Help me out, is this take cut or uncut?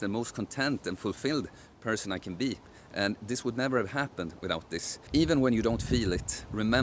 cut